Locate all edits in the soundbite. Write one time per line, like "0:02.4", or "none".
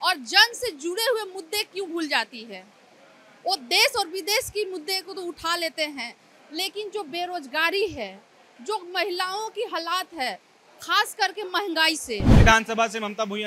0:12.3

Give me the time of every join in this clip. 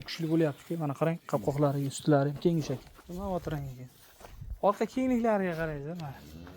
0:03.0

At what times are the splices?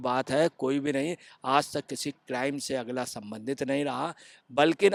none

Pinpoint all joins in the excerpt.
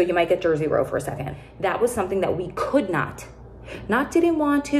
0:01.4

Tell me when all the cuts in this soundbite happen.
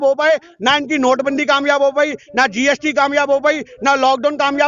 none

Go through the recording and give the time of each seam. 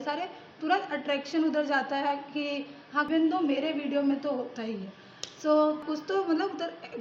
0:03.1
0:05.8

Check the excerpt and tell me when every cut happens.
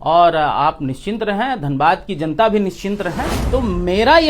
0:03.3

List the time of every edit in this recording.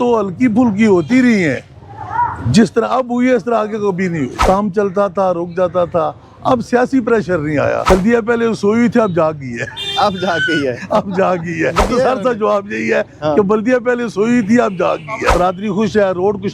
0:04.3
0:07.8
0:11.8
0:15.3

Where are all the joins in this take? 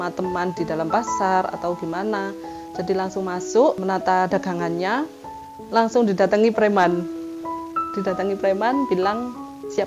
0:03.8
0:05.4

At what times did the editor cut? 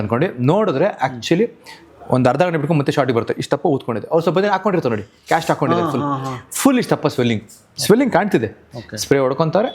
none

